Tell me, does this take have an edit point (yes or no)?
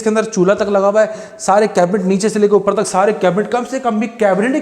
no